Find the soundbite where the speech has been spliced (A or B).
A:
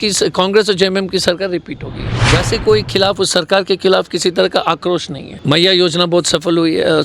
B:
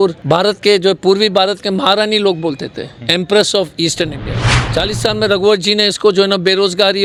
A